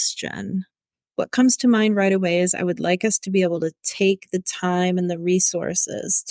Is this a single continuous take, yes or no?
no